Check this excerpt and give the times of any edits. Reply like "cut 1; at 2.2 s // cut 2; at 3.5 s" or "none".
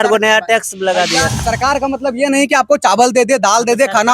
cut 1; at 1.4 s